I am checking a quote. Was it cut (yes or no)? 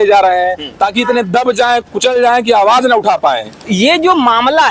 yes